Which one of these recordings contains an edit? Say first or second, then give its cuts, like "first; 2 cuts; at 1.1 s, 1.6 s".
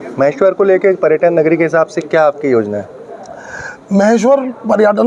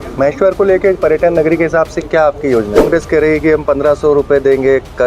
second; 1 cut; at 2.9 s